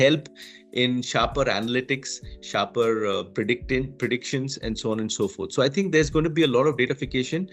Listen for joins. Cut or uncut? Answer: uncut